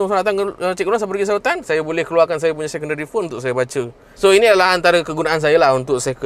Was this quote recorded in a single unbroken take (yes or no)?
yes